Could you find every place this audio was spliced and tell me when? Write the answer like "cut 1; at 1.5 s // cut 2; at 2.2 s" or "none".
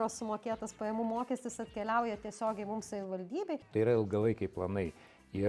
cut 1; at 3.6 s